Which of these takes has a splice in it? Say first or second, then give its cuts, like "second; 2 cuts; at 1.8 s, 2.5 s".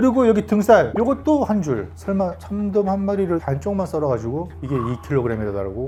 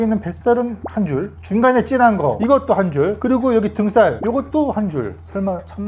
second; 1 cut; at 2.4 s